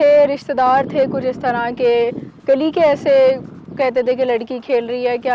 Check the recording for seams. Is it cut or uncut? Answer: uncut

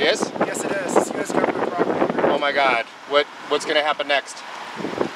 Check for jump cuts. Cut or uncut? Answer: cut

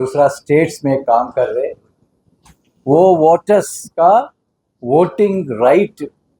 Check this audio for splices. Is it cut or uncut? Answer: uncut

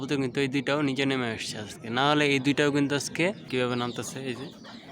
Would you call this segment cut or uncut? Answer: cut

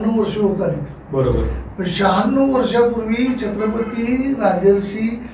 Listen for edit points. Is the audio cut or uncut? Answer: uncut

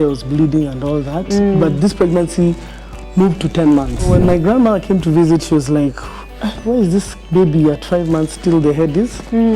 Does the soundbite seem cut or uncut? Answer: cut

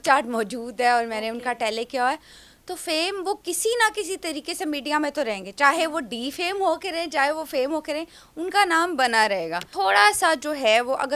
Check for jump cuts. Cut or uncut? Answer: cut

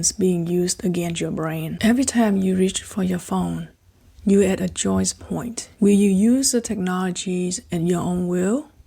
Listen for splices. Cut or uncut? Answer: cut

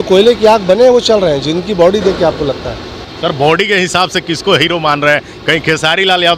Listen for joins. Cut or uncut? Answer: cut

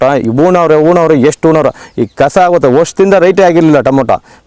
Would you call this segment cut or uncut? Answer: uncut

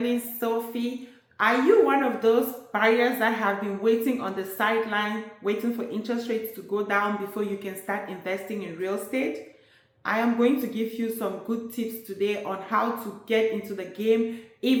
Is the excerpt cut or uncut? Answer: uncut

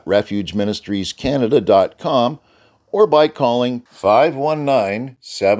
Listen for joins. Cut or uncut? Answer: uncut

